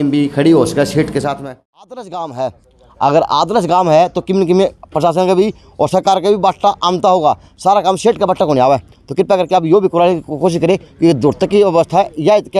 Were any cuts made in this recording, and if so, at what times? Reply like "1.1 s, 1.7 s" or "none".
1.4 s